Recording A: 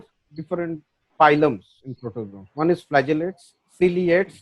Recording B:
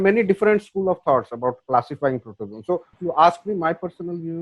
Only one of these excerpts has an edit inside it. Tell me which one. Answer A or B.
B